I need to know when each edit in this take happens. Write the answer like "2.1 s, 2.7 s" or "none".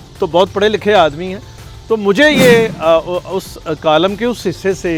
none